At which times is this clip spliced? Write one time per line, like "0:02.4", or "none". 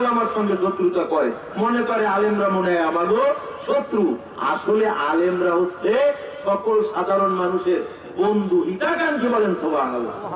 none